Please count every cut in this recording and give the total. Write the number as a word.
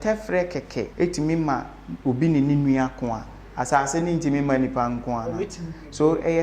one